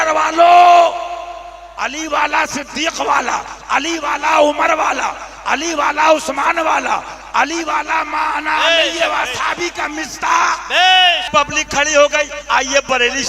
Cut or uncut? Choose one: cut